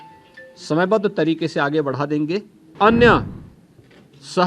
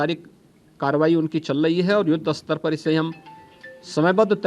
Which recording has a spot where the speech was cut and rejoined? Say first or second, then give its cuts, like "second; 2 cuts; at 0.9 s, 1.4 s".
first; 1 cut; at 2.7 s